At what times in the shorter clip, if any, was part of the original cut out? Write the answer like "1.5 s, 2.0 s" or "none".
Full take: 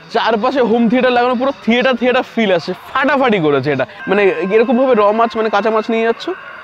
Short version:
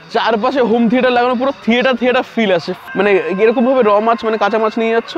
2.8 s